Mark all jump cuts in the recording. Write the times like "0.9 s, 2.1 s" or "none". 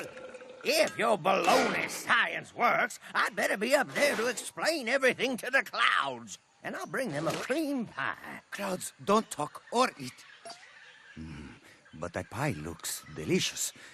none